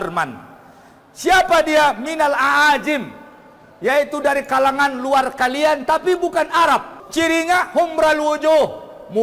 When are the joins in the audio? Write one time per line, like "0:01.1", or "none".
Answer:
0:07.0